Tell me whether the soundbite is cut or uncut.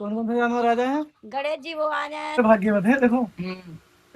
cut